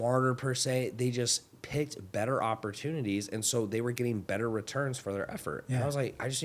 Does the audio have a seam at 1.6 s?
no; 0 cuts

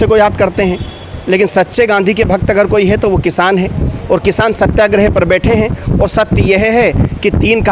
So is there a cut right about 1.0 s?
no; 0 cuts

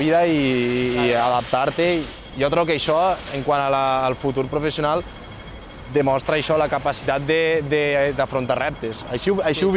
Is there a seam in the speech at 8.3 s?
no; 0 cuts

